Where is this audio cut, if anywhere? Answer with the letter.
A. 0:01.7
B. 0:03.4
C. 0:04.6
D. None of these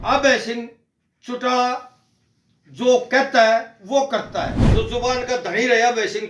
C